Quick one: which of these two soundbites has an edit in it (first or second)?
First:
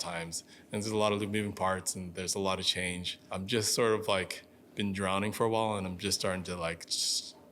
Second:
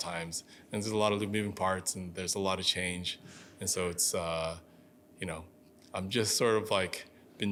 first